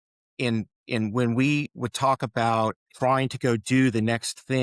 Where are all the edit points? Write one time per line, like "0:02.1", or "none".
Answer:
0:02.8